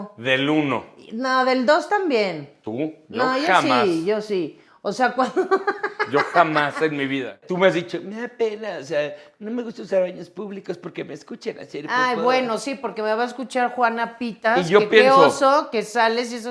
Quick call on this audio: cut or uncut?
cut